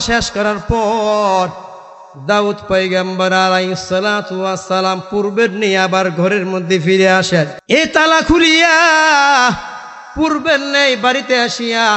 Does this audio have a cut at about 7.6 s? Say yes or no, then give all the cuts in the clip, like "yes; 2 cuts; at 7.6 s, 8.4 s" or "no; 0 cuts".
yes; 1 cut; at 7.6 s